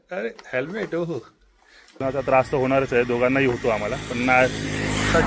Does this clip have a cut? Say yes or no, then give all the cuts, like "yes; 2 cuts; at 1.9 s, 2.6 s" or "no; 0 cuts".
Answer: yes; 1 cut; at 2.0 s